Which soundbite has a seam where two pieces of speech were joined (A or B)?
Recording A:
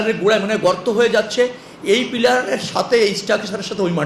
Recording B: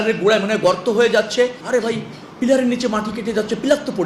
B